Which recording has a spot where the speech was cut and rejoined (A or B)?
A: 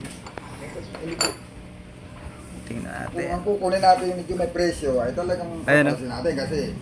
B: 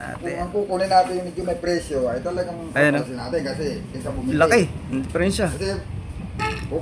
A